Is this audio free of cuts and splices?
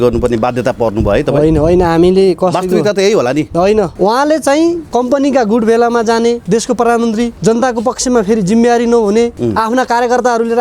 no; 5 cuts; at 3.9 s, 4.8 s, 6.4 s, 7.3 s, 9.4 s

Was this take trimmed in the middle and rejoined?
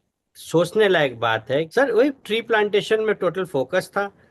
yes; 1 cut; at 1.7 s

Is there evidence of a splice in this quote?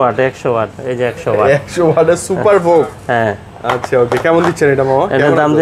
no; 0 cuts

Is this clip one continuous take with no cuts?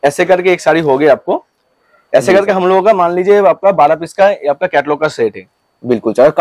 yes; 0 cuts

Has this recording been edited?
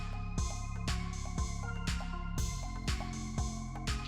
yes; 1 cut; at 3.1 s

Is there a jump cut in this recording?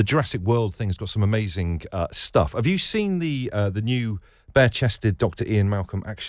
no; 0 cuts

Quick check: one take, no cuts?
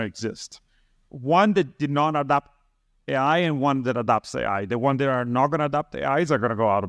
yes; 0 cuts

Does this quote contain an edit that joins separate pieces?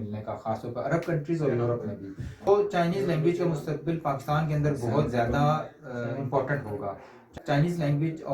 yes; 2 cuts; at 2.5 s, 7.2 s

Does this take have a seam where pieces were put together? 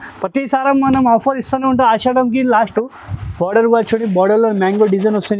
yes; 1 cut; at 2.7 s

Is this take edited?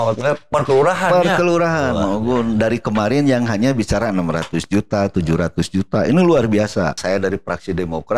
yes; 1 cut; at 7.0 s

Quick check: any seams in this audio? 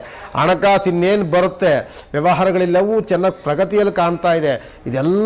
no; 0 cuts

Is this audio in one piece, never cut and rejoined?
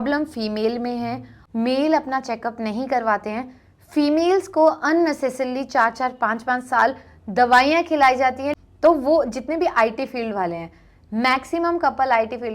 no; 2 cuts; at 1.3 s, 8.5 s

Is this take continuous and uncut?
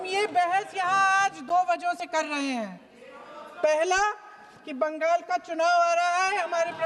yes; 0 cuts

